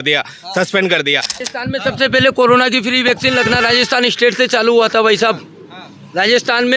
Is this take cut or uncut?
cut